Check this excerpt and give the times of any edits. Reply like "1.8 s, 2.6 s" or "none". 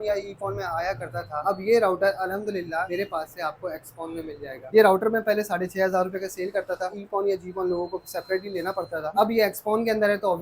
2.9 s, 4.6 s, 6.9 s